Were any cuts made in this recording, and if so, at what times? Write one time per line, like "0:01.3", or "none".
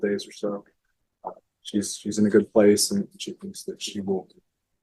none